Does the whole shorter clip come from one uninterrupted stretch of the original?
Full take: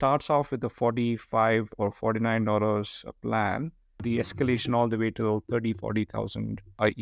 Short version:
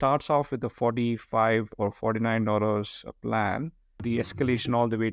yes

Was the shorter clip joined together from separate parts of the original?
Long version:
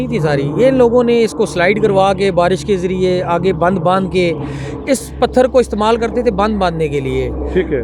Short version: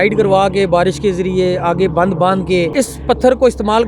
yes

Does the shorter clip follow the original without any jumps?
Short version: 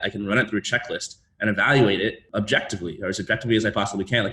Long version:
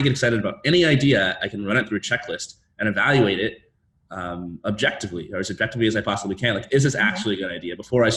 no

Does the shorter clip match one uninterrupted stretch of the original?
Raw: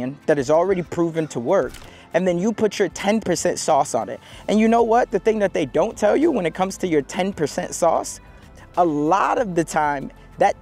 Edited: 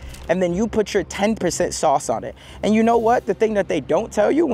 yes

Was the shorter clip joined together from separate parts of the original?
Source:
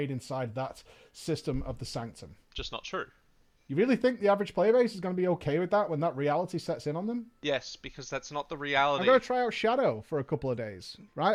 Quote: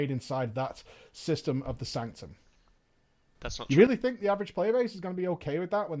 no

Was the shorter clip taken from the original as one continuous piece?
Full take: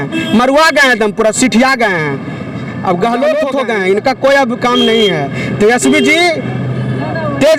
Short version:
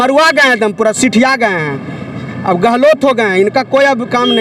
no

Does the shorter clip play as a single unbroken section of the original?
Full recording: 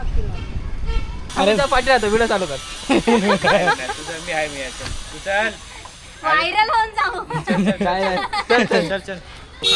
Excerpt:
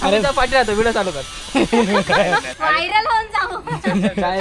no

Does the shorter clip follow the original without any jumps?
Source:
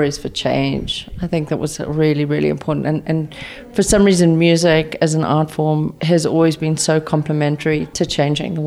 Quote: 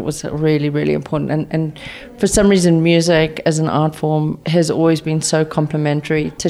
yes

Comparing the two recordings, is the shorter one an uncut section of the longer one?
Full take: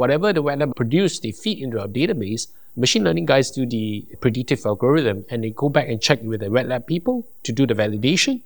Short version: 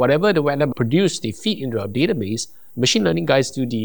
yes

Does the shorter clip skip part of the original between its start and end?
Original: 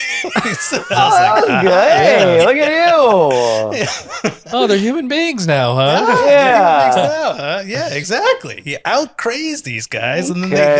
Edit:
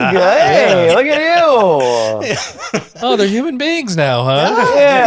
no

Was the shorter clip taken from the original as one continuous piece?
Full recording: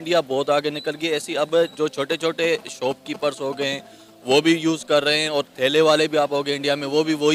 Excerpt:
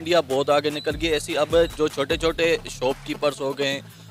yes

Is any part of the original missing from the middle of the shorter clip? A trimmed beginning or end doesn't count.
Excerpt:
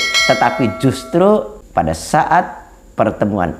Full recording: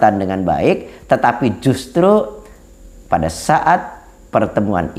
yes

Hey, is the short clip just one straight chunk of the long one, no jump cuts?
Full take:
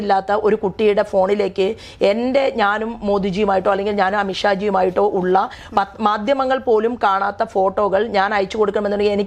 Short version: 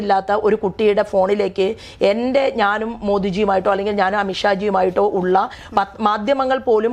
yes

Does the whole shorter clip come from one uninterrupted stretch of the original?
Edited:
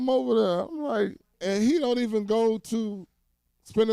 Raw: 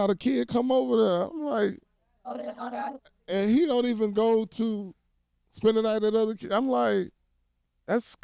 no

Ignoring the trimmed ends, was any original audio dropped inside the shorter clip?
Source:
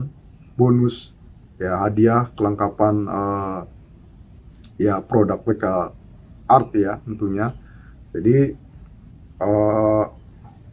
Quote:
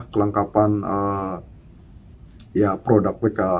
no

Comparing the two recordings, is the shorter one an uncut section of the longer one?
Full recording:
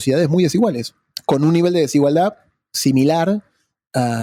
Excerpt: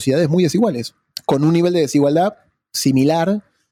yes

